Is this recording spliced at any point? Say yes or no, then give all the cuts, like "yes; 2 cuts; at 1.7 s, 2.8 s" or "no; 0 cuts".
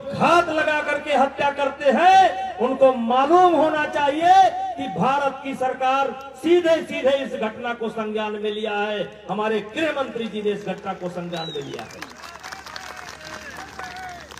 no; 0 cuts